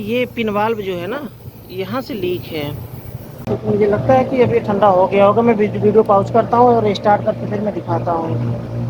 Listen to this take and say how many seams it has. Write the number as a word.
one